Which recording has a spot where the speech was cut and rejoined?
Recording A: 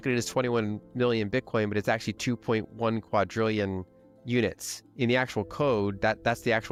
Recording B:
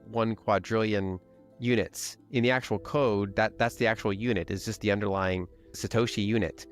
B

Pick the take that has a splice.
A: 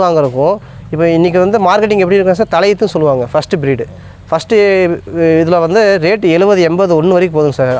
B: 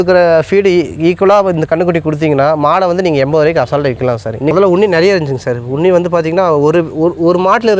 B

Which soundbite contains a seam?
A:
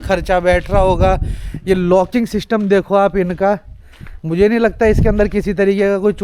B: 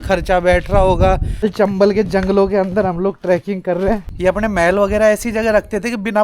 B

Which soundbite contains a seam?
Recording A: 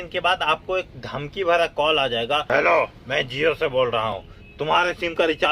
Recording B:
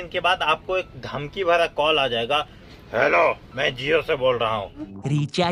A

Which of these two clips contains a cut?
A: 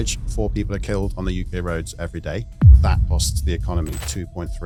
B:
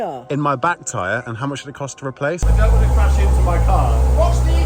B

